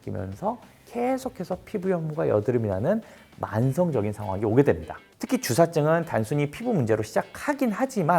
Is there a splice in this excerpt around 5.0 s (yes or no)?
yes